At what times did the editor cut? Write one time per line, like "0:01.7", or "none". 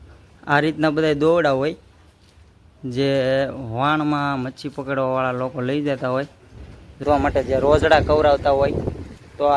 0:07.0